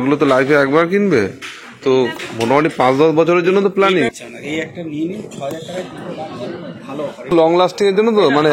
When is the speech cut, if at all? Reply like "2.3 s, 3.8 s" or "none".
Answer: 4.1 s, 7.3 s